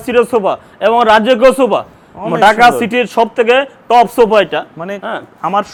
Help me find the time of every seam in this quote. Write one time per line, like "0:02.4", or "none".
none